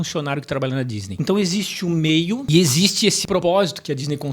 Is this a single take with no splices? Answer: no; 3 cuts; at 1.1 s, 2.4 s, 3.4 s

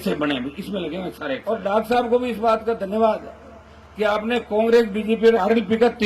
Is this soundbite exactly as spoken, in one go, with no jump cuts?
no; 1 cut; at 1.4 s

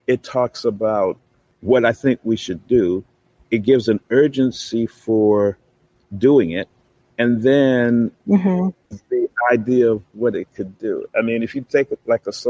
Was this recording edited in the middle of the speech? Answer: no; 0 cuts

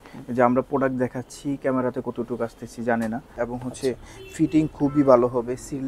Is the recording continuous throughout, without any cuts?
no; 1 cut; at 3.3 s

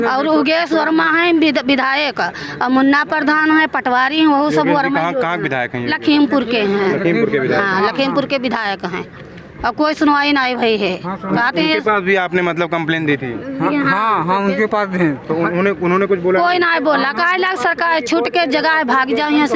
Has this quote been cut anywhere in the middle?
no; 0 cuts

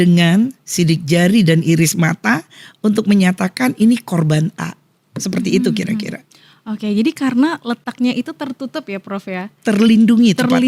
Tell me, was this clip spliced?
no; 0 cuts

